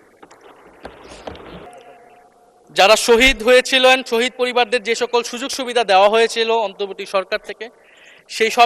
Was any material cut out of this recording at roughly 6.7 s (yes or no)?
no